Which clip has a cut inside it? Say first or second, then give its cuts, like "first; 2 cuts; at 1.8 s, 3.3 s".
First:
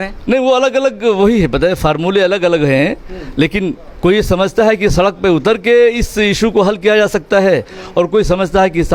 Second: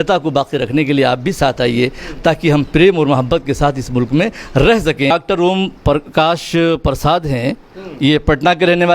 second; 1 cut; at 5.1 s